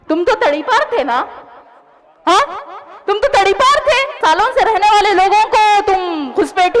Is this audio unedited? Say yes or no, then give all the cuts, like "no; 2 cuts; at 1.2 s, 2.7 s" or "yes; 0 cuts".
no; 1 cut; at 4.2 s